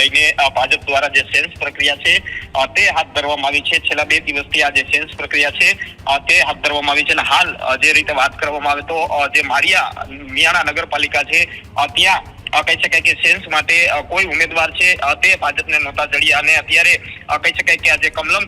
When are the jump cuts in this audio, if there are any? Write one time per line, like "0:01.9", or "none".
none